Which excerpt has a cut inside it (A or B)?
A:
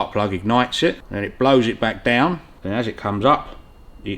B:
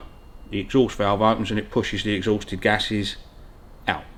A